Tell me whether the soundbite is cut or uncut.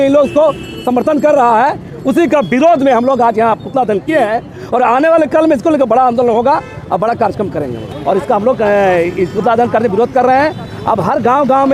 cut